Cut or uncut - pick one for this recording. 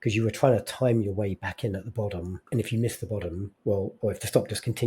cut